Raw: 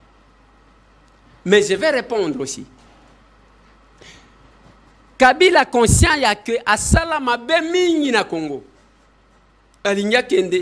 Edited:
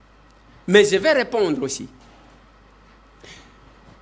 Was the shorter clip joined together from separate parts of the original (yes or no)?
no